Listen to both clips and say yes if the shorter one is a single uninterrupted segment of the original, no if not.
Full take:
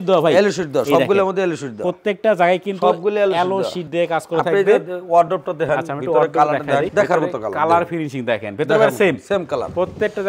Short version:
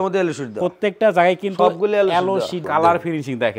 no